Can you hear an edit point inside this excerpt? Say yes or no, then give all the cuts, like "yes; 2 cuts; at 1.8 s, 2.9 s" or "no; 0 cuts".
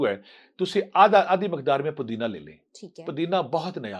no; 0 cuts